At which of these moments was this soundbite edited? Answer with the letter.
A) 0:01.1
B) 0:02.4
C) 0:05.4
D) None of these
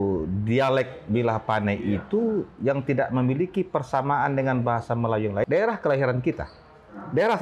C